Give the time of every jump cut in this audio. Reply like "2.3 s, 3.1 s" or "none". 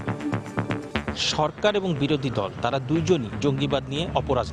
1.2 s